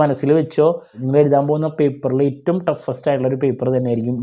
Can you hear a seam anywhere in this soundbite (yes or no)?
yes